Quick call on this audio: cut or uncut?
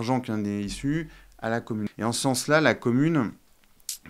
cut